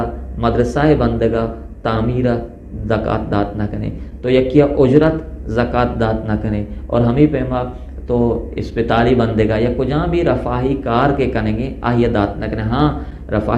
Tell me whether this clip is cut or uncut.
uncut